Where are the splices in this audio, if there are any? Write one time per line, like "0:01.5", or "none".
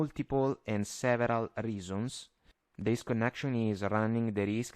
0:02.9